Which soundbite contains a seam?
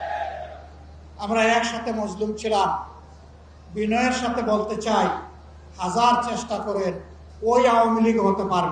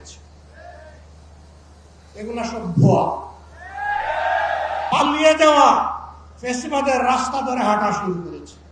second; 1 cut; at 4.9 s

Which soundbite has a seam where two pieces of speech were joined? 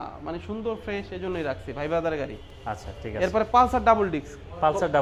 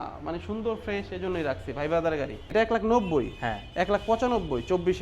second; 1 cut; at 2.5 s

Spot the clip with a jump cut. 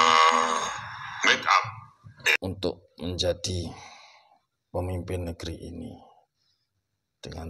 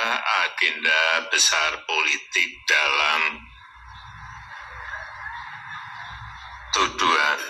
first; 1 cut; at 2.4 s

